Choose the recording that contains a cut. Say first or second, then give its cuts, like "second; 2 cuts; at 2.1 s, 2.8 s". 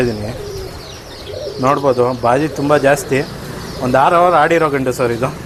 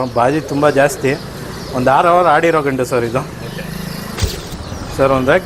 second; 1 cut; at 4.5 s